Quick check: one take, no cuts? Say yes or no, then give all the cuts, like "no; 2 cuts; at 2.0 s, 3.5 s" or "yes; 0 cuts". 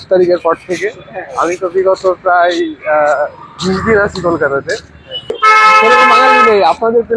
no; 1 cut; at 5.3 s